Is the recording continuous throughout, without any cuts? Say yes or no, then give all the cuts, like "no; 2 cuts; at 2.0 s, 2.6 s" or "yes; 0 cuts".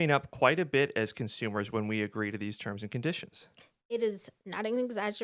yes; 0 cuts